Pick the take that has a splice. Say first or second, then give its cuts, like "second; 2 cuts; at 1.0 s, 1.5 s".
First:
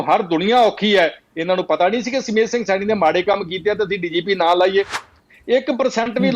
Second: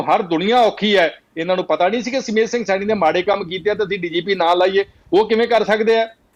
first; 1 cut; at 5.0 s